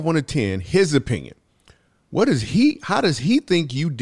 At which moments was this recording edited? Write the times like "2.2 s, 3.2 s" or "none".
none